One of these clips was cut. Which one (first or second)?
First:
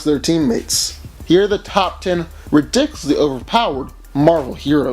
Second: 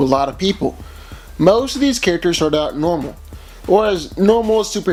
first